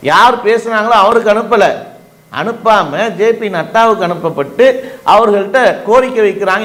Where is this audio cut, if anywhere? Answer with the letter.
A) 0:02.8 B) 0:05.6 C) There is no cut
C